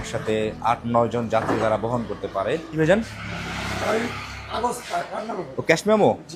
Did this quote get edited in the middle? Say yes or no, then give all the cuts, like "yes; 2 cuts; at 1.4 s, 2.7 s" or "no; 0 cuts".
no; 0 cuts